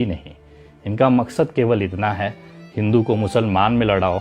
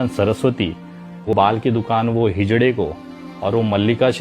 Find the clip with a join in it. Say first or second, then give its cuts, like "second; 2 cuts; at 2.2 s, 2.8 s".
second; 1 cut; at 1.3 s